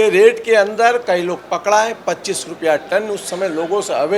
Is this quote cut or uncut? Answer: uncut